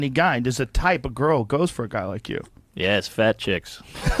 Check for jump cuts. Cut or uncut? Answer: uncut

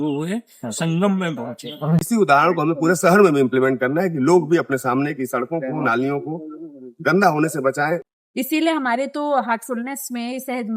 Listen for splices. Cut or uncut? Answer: cut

